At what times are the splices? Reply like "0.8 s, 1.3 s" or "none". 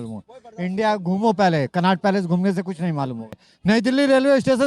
3.3 s